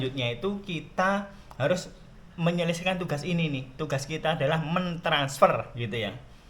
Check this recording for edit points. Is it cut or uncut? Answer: uncut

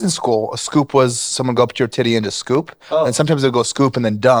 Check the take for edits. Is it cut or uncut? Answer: uncut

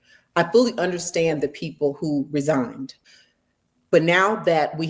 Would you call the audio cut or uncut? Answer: cut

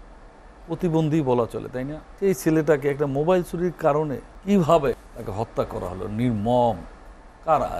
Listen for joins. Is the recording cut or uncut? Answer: cut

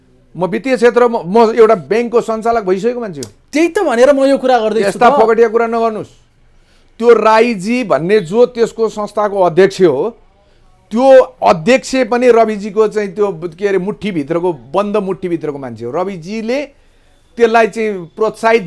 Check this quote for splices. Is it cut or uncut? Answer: uncut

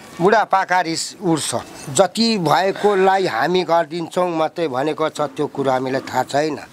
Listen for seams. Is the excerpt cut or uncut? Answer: cut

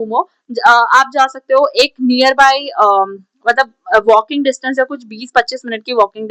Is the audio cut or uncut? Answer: uncut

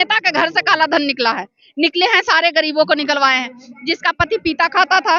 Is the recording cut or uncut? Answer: uncut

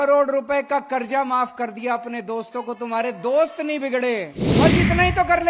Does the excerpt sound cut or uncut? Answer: cut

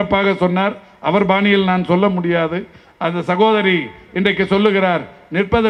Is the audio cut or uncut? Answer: uncut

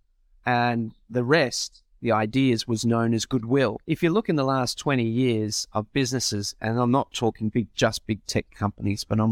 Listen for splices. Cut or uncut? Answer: cut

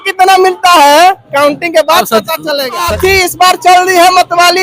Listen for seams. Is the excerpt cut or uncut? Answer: cut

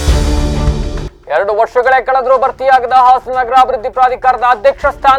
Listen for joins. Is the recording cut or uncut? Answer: uncut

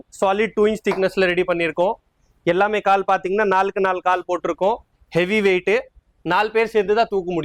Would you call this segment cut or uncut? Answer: uncut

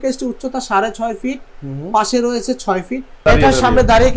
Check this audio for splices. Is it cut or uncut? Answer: cut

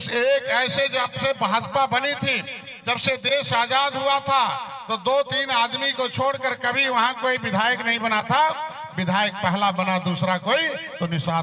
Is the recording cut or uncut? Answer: uncut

